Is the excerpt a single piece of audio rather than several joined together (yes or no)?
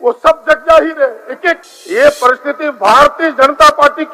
no